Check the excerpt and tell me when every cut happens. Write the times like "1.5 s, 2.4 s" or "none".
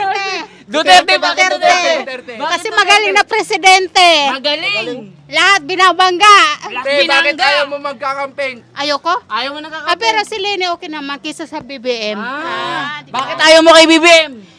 none